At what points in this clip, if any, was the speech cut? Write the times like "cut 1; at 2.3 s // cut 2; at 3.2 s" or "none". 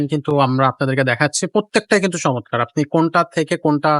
none